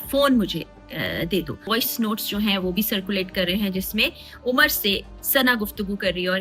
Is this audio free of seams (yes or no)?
no